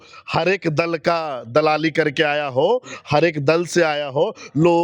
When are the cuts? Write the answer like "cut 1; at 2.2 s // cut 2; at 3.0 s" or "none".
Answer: none